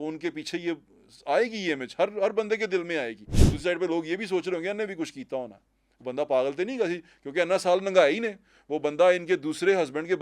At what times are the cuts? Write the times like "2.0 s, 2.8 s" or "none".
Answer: 3.4 s